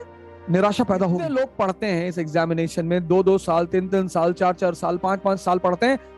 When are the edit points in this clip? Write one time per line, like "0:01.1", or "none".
0:01.3